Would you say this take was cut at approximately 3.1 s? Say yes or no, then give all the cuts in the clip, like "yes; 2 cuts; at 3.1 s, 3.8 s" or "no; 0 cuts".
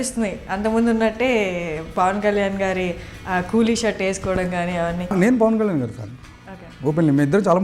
no; 1 cut; at 5.1 s